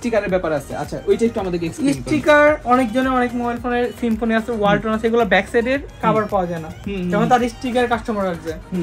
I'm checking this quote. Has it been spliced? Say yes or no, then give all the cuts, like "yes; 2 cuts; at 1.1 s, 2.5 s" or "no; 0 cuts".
no; 0 cuts